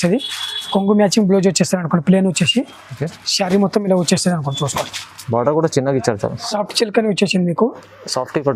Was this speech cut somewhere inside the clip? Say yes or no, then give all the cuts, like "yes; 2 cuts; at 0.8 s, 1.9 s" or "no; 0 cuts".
yes; 1 cut; at 6.3 s